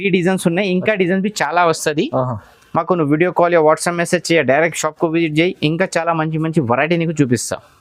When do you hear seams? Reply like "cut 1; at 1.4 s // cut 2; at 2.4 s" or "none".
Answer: none